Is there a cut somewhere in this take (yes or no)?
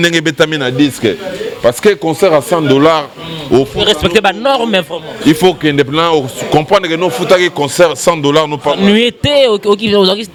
no